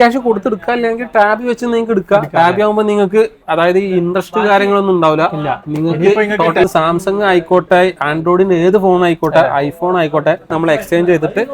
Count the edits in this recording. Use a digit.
2